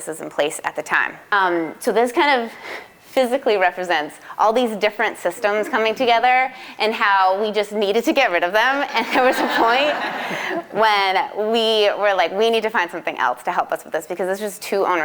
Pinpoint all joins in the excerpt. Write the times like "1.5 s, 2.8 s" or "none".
1.3 s

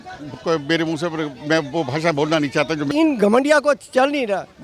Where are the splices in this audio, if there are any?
2.9 s

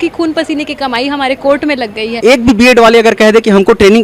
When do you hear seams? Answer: 2.2 s

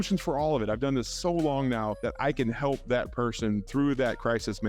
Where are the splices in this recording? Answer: 2.0 s, 3.7 s

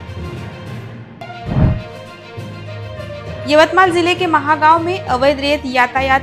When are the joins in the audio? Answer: 0.9 s

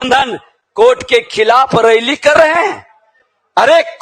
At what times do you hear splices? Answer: none

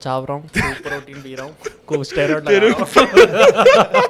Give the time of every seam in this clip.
none

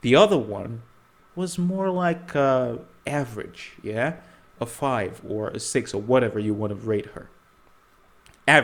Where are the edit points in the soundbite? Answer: none

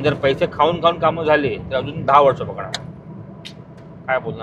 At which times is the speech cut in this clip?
none

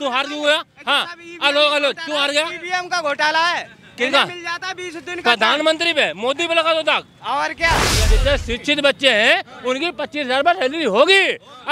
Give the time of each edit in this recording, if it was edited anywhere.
8.0 s

